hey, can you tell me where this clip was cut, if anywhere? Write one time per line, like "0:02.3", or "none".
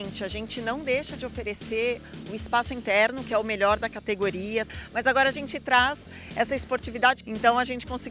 0:04.7
0:07.2